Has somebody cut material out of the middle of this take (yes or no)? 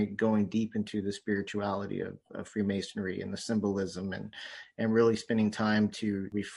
no